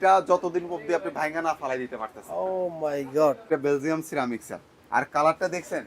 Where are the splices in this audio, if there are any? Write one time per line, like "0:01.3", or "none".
0:03.5